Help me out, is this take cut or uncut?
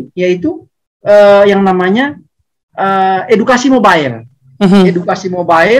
uncut